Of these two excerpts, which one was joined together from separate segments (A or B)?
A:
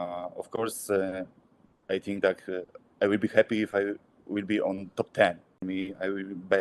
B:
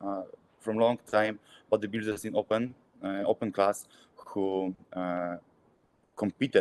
A